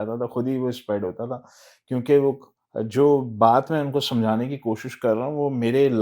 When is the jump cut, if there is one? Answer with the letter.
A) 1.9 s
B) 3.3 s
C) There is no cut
C